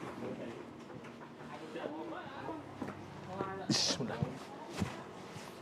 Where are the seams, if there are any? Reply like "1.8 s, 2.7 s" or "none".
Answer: 2.5 s, 4.4 s